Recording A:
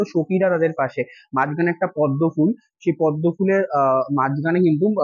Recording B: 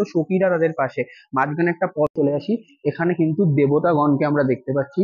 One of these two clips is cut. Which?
B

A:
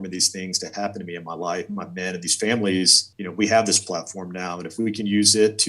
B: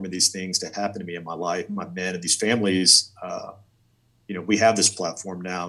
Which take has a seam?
A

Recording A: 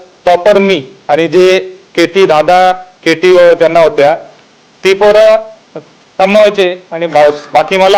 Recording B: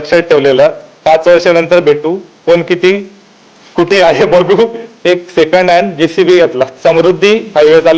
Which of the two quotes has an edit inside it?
B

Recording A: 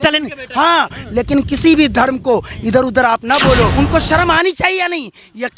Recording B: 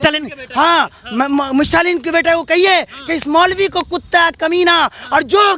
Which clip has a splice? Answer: A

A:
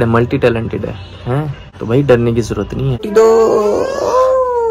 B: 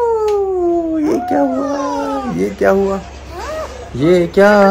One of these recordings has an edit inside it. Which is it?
A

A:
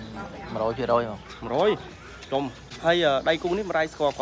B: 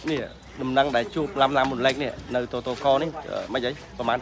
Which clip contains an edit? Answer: A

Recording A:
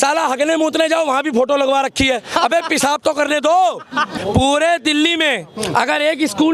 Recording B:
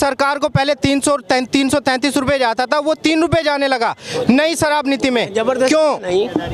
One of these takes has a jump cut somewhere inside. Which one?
A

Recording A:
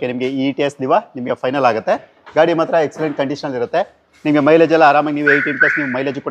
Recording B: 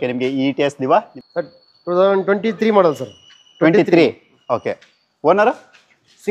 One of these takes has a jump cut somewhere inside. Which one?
B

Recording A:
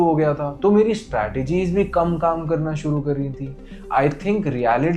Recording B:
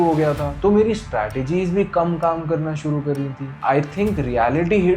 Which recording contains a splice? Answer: B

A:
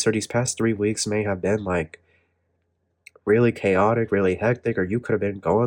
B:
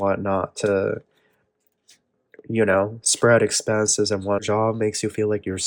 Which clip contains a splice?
B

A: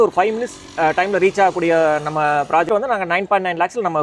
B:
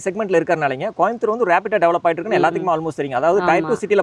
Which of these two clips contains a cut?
A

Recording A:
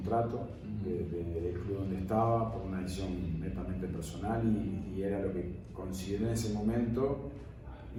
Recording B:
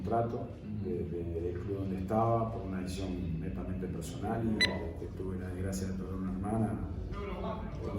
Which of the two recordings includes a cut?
B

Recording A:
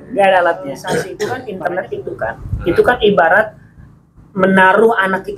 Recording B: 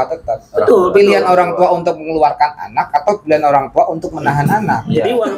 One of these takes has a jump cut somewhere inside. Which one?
A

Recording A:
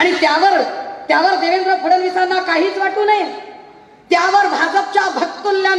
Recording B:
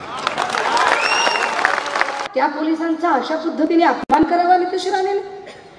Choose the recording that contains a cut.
B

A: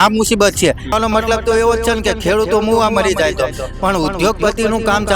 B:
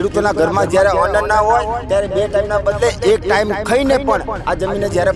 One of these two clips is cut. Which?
A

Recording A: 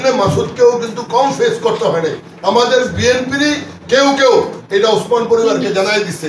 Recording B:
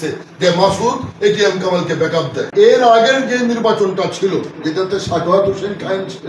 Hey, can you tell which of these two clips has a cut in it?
B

